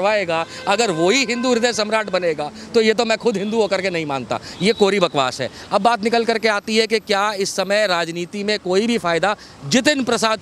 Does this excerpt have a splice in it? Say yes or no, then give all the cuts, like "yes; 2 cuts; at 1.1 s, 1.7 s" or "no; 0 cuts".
no; 0 cuts